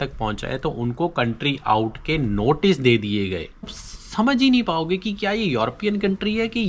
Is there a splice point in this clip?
yes; 1 cut; at 3.7 s

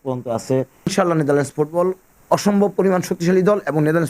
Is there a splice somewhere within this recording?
yes; 1 cut; at 0.9 s

